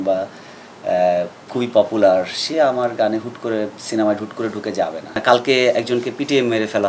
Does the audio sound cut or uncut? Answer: cut